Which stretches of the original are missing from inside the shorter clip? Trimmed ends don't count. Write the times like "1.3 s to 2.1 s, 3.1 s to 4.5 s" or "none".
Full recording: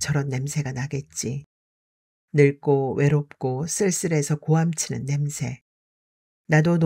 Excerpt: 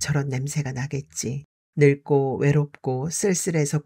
1.5 s to 2.1 s

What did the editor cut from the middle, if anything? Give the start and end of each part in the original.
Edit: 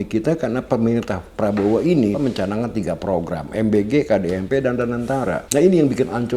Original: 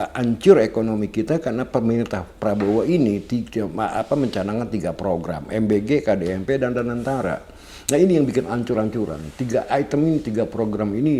3.2 s to 4.1 s, 7.4 s to 7.8 s

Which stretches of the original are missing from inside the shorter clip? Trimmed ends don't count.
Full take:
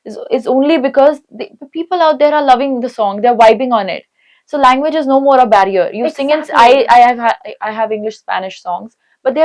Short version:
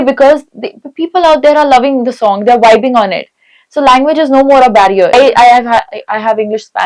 5.9 s to 6.7 s

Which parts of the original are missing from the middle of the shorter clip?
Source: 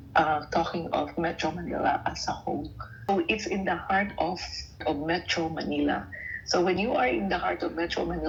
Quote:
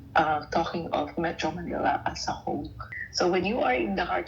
2.9 s to 6.2 s

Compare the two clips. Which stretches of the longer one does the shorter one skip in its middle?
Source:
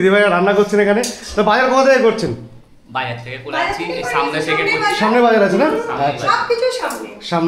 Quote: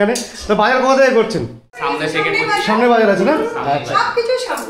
2.6 s to 4.1 s

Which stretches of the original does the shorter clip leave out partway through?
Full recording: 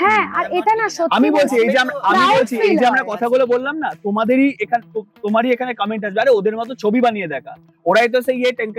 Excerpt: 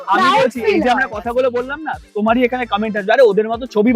4.0 s to 5.1 s

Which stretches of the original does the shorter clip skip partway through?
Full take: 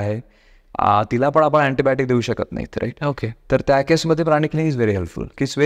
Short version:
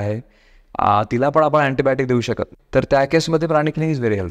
2.5 s to 3.3 s

